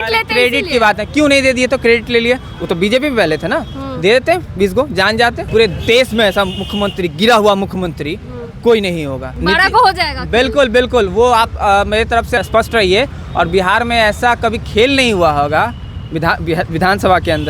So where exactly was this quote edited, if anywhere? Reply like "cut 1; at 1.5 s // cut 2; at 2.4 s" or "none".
cut 1; at 5.4 s // cut 2; at 9.2 s // cut 3; at 12.4 s